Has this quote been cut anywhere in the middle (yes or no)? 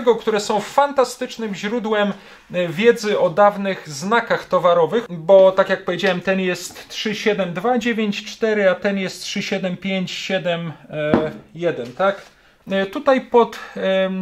yes